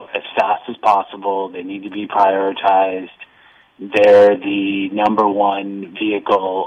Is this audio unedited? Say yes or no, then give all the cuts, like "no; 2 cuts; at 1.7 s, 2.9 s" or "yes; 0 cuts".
yes; 0 cuts